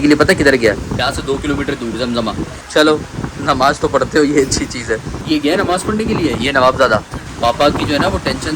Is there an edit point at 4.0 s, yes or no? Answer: no